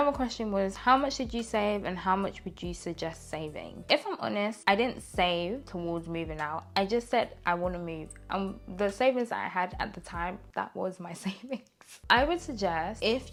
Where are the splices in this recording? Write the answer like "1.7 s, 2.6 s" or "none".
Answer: none